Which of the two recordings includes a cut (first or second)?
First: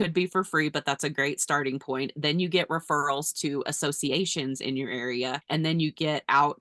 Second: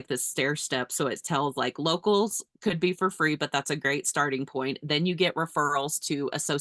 first